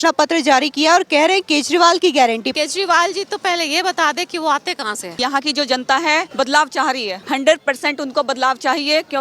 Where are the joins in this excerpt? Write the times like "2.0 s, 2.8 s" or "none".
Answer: 2.5 s, 5.2 s, 6.3 s, 7.2 s